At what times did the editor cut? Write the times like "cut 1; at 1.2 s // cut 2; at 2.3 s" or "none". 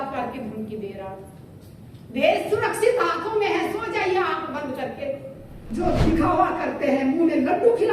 cut 1; at 5.6 s